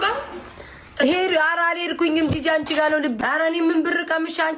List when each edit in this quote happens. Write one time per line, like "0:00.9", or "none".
0:03.2

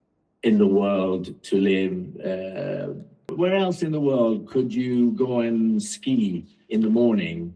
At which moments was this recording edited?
0:03.3

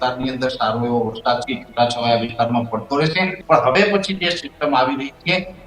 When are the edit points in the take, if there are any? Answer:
0:03.4

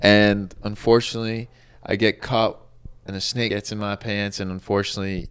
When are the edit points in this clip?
0:03.5

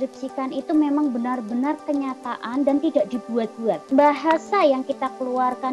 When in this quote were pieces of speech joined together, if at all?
0:03.8

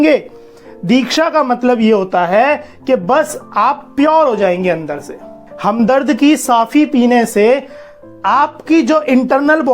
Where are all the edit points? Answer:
0:05.4

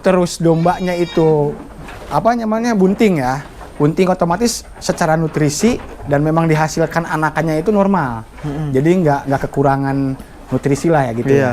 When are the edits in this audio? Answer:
none

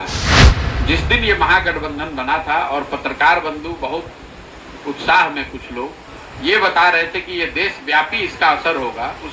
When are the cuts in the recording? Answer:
none

